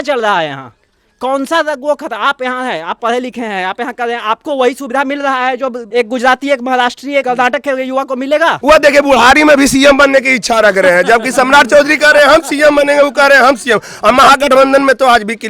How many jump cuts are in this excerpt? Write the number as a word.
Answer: three